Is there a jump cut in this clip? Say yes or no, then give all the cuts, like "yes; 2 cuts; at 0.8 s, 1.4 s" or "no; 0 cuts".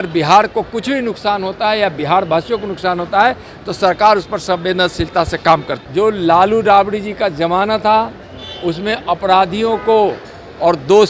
yes; 1 cut; at 5.8 s